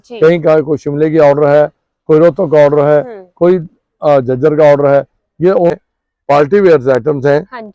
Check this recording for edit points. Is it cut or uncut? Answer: cut